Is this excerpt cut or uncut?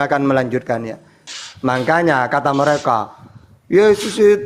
cut